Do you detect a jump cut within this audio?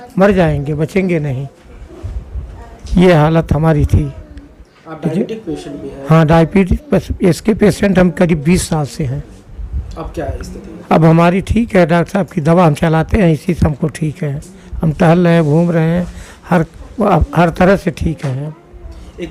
no; 0 cuts

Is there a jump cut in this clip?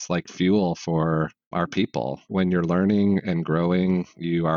yes; 1 cut; at 1.5 s

